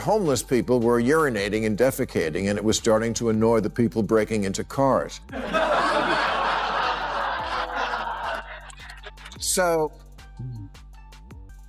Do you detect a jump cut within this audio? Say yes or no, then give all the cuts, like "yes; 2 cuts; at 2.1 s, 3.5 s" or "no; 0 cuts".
yes; 1 cut; at 10.6 s